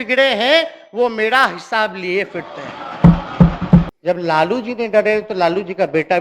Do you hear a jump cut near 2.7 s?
no; 1 cut; at 3.9 s

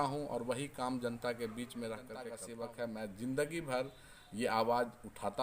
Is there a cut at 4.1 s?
no; 1 cut; at 2.5 s

